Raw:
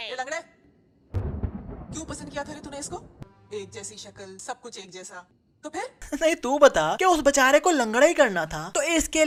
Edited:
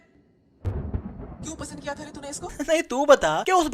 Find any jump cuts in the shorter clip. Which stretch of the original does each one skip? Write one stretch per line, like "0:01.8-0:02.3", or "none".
0:03.0-0:06.1

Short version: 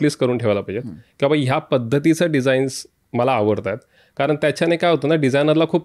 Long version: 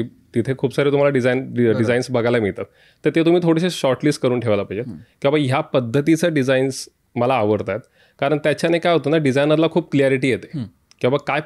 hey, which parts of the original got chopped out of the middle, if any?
none

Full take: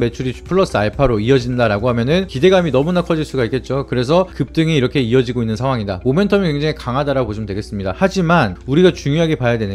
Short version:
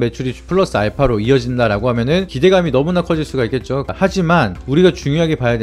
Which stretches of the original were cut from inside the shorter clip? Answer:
0:03.9-0:07.9

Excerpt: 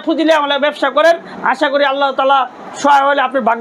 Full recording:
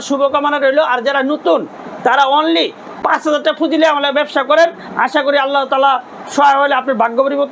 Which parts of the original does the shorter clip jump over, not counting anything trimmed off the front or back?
none

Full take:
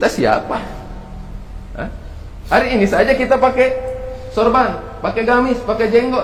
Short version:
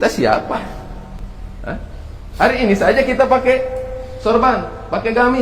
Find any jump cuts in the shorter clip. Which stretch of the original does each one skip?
0:01.2-0:01.3

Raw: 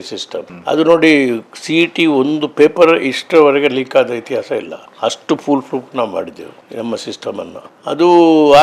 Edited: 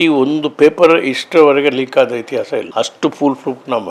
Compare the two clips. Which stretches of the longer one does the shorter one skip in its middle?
0:04.7-0:04.9

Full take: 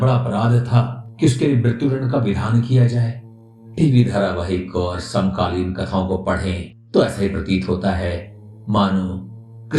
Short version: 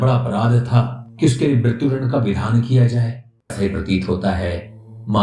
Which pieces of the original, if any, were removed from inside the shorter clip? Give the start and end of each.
0:03.5-0:07.1

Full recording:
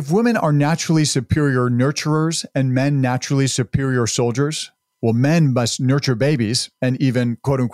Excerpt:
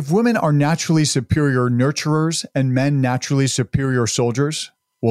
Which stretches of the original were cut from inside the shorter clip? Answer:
none

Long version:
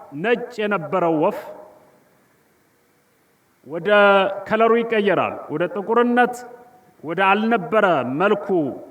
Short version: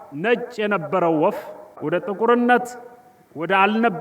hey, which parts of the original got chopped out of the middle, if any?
0:01.7-0:05.4

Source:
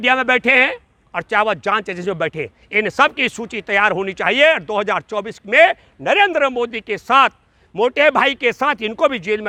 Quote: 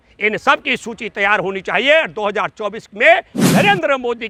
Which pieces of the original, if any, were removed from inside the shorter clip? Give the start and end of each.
none

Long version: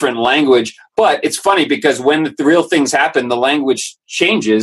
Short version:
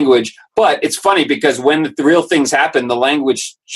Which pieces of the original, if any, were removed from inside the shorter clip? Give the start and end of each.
none

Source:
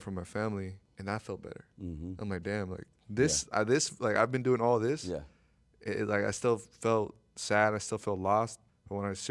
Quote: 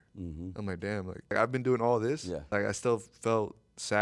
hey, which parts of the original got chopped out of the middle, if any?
0:03.0-0:04.1
0:05.3-0:06.1

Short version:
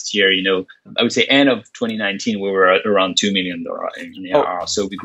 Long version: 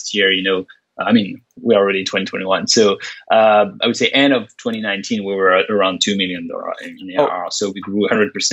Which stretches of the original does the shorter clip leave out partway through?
0:00.9-0:03.8

